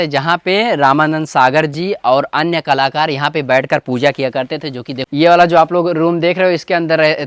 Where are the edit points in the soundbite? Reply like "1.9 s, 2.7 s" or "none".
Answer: 5.2 s